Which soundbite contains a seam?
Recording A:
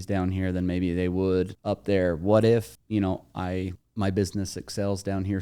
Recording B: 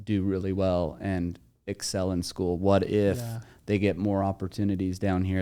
A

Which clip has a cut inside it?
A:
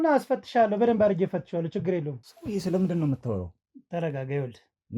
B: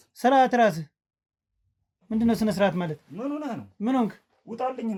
A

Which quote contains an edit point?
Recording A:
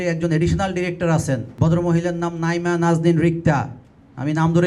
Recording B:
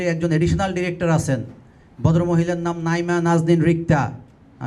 A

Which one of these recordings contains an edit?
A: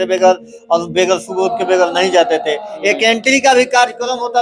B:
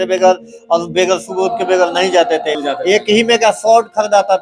B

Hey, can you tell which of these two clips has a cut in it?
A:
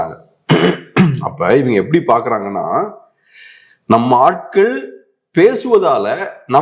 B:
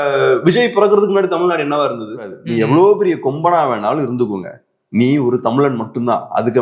B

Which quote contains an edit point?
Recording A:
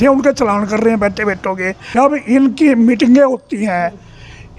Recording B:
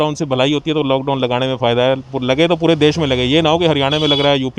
A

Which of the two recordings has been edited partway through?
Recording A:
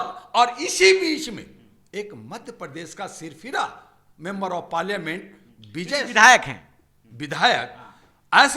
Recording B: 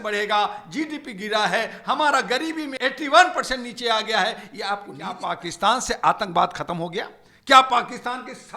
B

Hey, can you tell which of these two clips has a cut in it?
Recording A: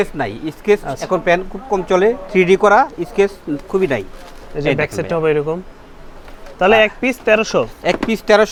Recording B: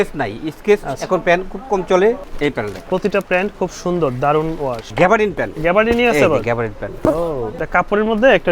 B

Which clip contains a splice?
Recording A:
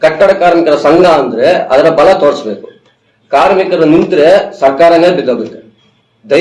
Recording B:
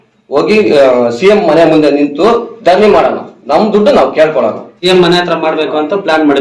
B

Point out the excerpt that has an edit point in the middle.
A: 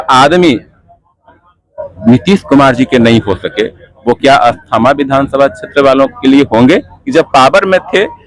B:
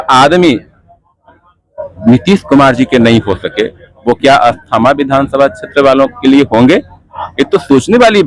A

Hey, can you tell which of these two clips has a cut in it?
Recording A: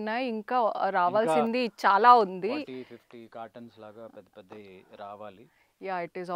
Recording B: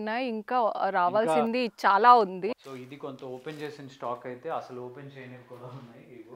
B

